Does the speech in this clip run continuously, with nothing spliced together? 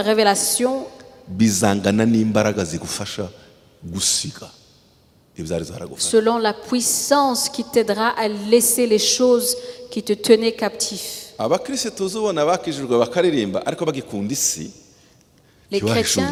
yes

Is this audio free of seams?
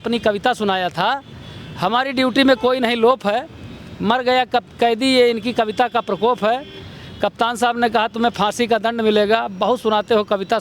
yes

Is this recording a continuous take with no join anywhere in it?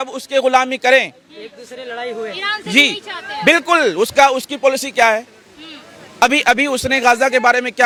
yes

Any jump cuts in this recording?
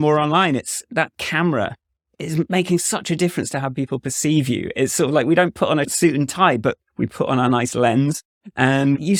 no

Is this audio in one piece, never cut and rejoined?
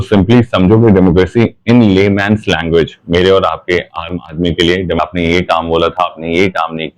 no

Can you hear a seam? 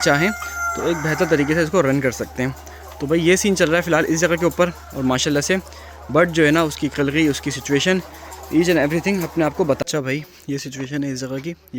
yes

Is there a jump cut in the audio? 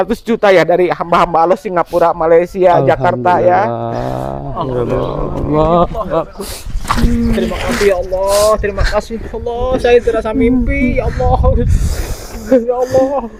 no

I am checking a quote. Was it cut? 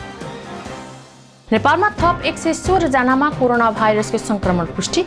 no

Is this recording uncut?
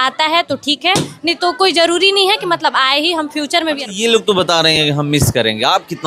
no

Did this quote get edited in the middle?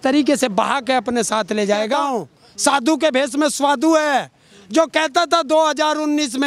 yes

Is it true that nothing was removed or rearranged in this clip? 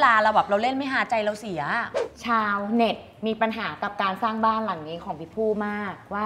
no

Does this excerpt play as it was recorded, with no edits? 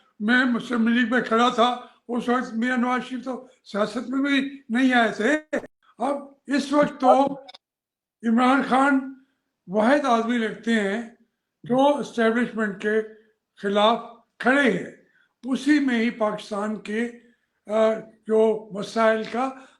no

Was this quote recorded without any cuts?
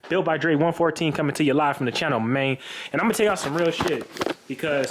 yes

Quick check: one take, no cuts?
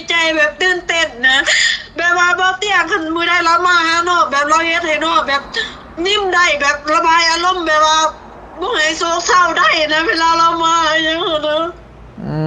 yes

